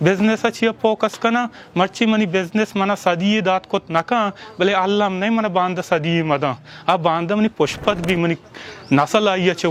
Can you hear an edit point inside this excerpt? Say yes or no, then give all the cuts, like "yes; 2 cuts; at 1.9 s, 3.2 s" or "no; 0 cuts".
no; 0 cuts